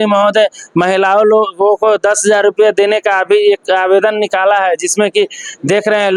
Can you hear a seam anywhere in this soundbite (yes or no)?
no